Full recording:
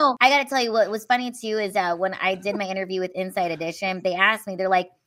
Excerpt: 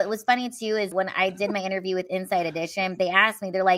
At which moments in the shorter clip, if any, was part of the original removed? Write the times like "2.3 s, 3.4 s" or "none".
0.9 s